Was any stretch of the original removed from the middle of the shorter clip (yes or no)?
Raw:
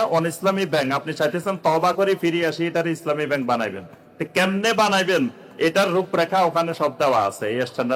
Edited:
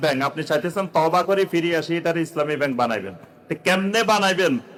no